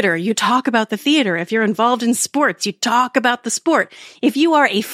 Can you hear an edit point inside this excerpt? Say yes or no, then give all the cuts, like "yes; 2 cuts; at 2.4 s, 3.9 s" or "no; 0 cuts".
no; 0 cuts